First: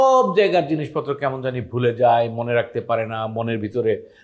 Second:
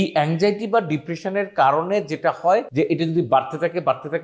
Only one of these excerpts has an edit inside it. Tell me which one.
second; 1 cut; at 2.7 s

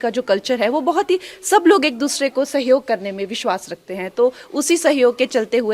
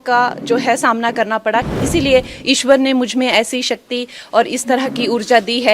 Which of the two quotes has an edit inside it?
second; 1 cut; at 1.7 s

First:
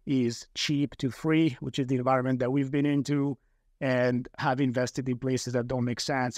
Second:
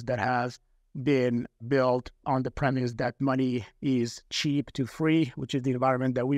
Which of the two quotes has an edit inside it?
first; 1 cut; at 4.4 s

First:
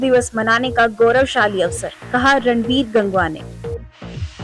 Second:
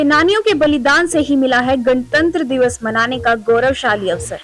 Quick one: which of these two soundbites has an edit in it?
first; 1 cut; at 3.5 s

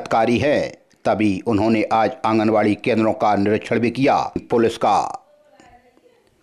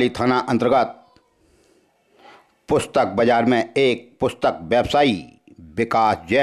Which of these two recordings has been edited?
first; 1 cut; at 4.4 s

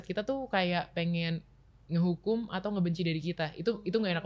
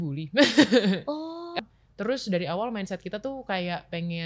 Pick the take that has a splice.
second; 1 cut; at 1.5 s

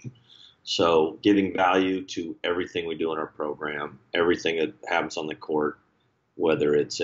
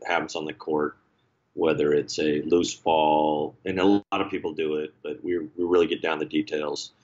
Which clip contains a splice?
second; 1 cut; at 4.1 s

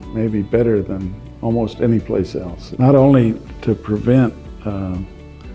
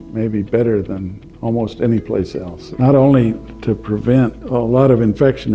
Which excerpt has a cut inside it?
second; 1 cut; at 4.4 s

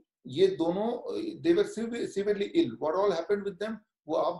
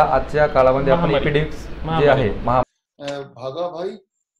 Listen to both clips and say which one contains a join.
second; 1 cut; at 2.6 s

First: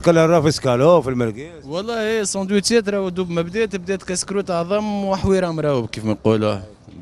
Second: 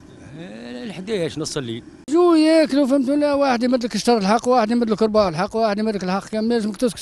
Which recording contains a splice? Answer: second; 1 cut; at 2.0 s

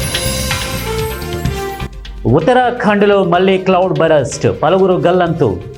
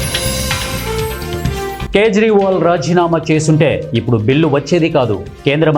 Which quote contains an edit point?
second; 1 cut; at 1.8 s

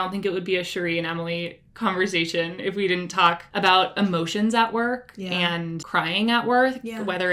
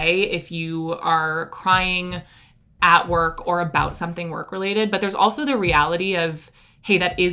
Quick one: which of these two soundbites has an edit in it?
first; 2 cuts; at 3.5 s, 5.8 s

